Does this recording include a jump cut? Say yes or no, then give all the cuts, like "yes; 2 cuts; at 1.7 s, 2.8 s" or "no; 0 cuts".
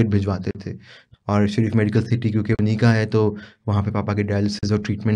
no; 0 cuts